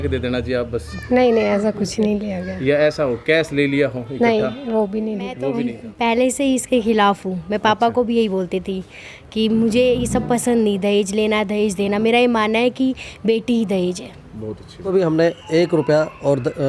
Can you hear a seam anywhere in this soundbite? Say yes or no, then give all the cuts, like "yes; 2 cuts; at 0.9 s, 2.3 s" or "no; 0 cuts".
yes; 2 cuts; at 5.8 s, 14.9 s